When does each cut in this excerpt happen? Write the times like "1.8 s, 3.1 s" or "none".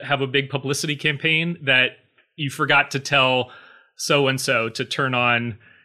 none